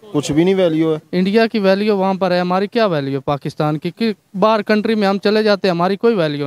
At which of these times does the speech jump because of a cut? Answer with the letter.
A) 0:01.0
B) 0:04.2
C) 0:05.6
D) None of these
A